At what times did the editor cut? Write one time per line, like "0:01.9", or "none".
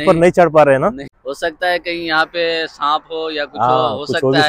0:01.1